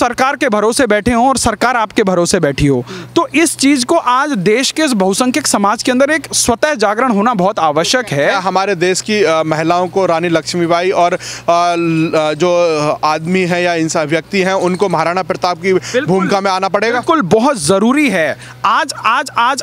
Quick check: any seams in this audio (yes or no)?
no